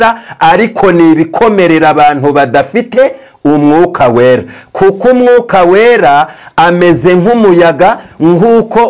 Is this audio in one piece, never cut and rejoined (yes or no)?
yes